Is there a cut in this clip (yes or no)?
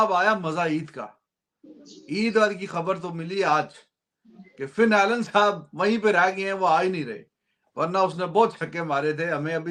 no